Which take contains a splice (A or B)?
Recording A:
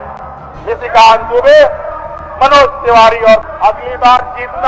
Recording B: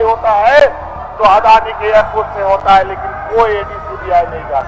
A